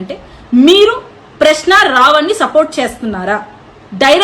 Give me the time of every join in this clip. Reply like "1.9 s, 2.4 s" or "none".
none